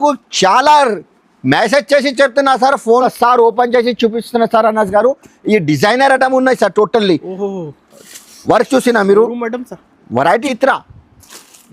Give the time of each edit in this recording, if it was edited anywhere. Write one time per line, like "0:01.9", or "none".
0:03.0
0:10.6